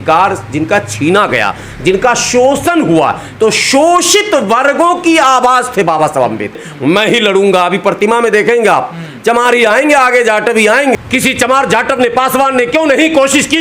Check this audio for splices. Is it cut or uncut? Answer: cut